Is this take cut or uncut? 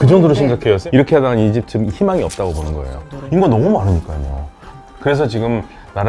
cut